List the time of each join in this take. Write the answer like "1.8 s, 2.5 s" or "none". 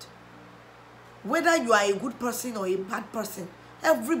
none